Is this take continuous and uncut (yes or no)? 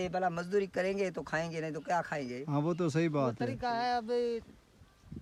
yes